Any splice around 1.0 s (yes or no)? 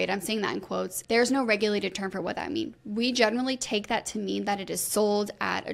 yes